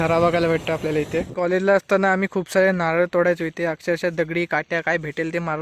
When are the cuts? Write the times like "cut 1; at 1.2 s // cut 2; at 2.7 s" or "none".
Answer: cut 1; at 1.3 s